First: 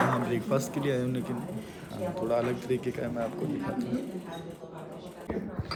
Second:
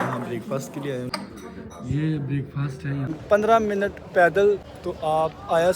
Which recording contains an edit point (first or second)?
second